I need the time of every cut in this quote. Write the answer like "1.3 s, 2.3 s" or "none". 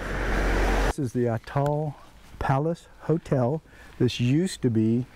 0.9 s